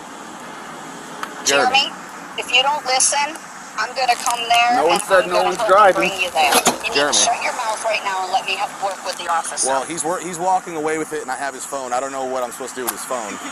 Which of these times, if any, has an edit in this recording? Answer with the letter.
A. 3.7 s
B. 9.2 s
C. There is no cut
C